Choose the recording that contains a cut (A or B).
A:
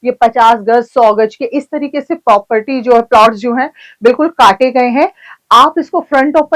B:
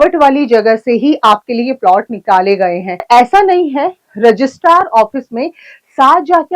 B